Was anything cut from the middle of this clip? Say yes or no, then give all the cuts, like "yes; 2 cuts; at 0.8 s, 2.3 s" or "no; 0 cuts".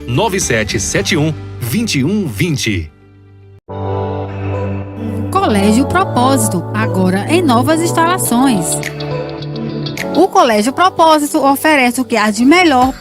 yes; 1 cut; at 3.6 s